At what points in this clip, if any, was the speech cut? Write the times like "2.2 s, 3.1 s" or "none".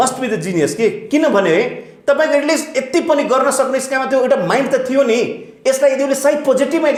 none